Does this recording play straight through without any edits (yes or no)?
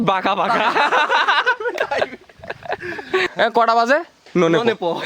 no